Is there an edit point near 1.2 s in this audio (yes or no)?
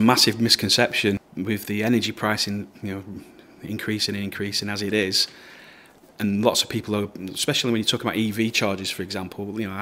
yes